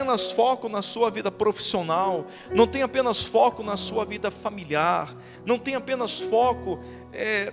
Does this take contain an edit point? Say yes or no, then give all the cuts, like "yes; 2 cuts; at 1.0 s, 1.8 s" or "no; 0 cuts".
no; 0 cuts